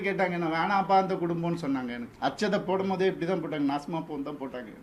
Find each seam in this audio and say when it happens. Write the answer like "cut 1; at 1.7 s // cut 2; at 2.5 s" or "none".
cut 1; at 2.0 s

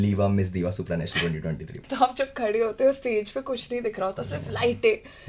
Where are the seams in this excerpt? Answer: cut 1; at 1.8 s

